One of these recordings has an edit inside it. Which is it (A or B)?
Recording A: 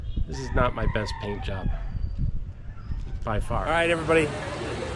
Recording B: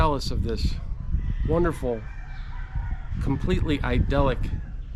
A